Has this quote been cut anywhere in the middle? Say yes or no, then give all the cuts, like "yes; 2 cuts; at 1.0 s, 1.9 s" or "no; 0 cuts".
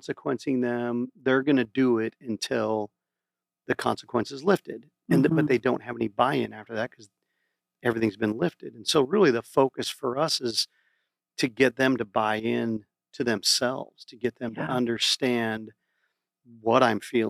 no; 0 cuts